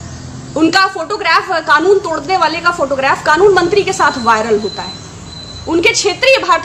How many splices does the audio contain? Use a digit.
0